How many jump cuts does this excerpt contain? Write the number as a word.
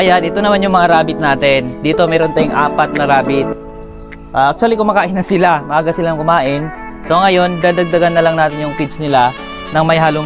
zero